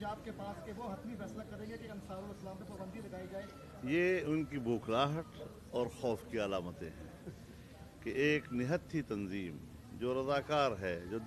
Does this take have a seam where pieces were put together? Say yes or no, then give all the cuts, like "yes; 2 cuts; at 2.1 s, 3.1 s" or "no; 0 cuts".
yes; 1 cut; at 6.6 s